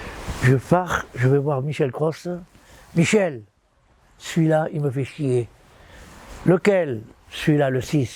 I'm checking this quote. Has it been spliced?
no; 0 cuts

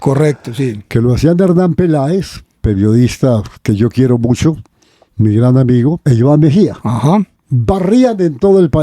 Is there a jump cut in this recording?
yes; 2 cuts; at 6.0 s, 7.4 s

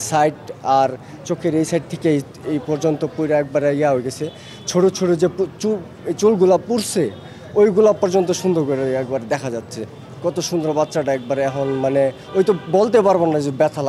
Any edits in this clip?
no; 0 cuts

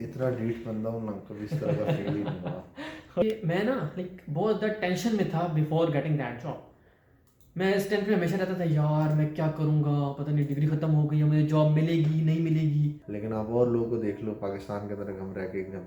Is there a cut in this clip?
yes; 2 cuts; at 3.2 s, 13.1 s

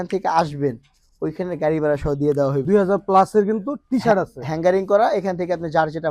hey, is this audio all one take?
no; 1 cut; at 2.6 s

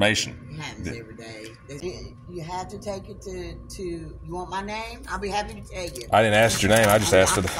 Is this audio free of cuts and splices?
no; 1 cut; at 1.8 s

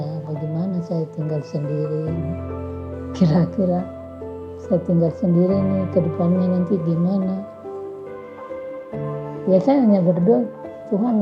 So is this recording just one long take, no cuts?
no; 2 cuts; at 7.6 s, 9.1 s

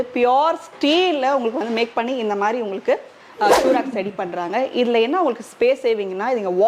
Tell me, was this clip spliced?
no; 0 cuts

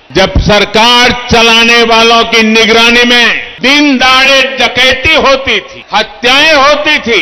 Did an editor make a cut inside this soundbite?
yes; 2 cuts; at 3.4 s, 5.7 s

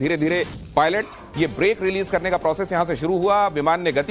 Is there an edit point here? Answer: no; 0 cuts

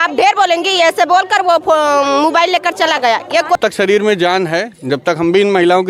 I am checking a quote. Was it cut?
yes; 1 cut; at 3.6 s

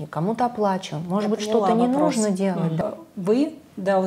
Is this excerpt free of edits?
no; 1 cut; at 2.8 s

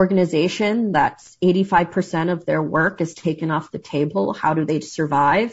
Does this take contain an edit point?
no; 0 cuts

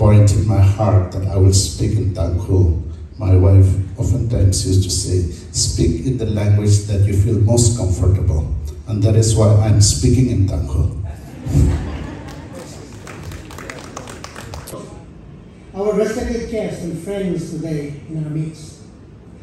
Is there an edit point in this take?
yes; 1 cut; at 14.7 s

